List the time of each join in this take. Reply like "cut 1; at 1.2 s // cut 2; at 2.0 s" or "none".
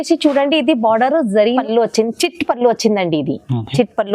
cut 1; at 1.6 s